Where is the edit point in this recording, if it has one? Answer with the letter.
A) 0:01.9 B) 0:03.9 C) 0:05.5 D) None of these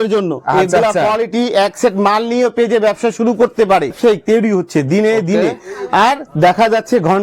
B